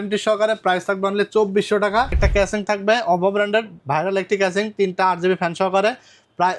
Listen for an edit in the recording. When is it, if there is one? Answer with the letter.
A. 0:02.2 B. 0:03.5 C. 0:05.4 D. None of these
A